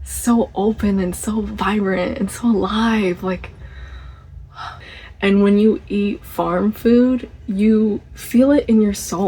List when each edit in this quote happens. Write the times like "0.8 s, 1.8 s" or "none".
4.8 s